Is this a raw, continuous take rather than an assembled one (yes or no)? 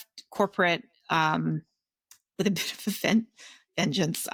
yes